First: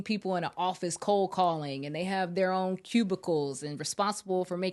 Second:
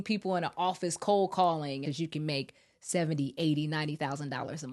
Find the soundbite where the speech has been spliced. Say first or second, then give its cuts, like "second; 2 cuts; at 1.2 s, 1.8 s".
second; 1 cut; at 1.8 s